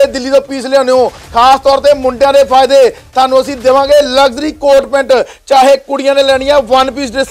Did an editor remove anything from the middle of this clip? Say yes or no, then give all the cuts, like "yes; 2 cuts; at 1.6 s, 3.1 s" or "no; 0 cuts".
no; 0 cuts